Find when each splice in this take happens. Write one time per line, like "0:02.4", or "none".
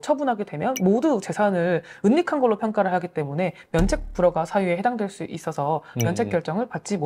none